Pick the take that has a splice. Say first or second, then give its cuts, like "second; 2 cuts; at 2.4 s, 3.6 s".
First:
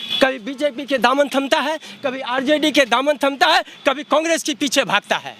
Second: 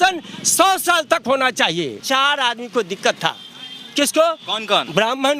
second; 1 cut; at 2.0 s